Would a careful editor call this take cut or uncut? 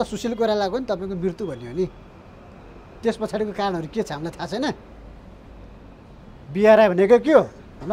uncut